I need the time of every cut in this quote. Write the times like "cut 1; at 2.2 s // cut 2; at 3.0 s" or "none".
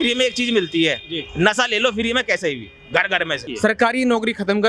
cut 1; at 3.5 s

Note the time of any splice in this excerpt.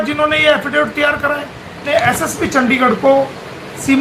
cut 1; at 1.9 s

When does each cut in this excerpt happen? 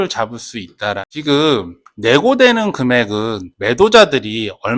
cut 1; at 1.1 s

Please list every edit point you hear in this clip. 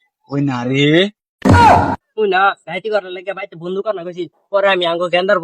cut 1; at 2.1 s

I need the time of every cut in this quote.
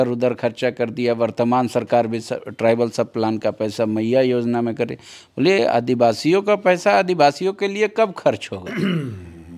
none

